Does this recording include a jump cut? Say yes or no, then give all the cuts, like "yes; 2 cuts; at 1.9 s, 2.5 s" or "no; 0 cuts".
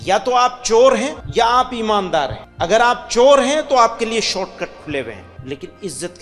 yes; 3 cuts; at 1.2 s, 2.4 s, 5.3 s